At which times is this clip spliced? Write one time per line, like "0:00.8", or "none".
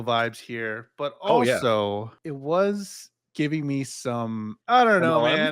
0:02.2
0:04.6